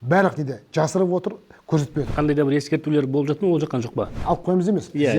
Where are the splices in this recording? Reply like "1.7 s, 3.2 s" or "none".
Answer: 2.1 s, 4.2 s